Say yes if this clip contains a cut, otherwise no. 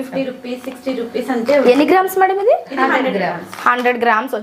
no